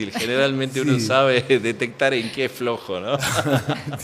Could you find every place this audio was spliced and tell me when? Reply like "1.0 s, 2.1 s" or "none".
none